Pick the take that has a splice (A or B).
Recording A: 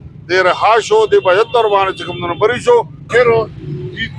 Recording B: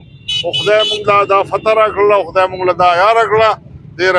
A